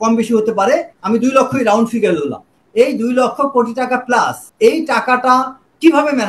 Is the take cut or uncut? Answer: cut